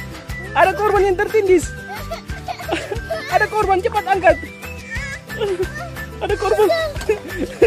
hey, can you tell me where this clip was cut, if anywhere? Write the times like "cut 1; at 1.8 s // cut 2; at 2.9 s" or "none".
none